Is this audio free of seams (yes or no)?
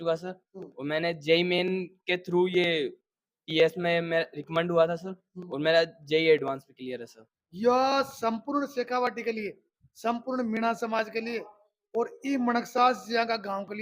no